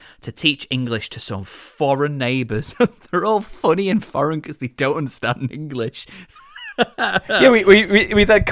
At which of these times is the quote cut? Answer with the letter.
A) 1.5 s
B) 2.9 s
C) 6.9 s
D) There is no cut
D